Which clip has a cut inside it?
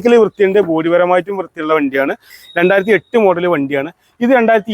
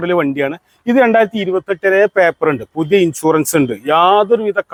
first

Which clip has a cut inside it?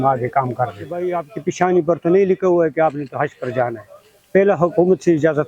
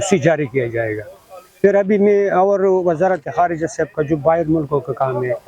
first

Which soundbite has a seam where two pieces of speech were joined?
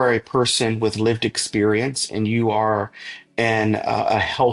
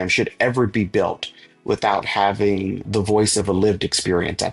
second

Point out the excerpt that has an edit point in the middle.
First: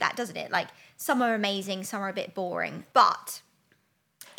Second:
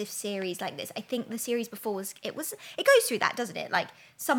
first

